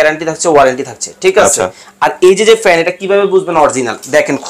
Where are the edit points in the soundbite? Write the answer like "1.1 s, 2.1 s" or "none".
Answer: none